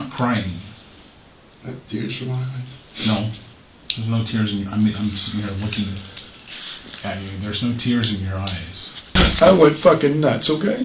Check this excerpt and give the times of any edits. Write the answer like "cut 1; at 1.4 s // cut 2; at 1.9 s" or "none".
cut 1; at 9.1 s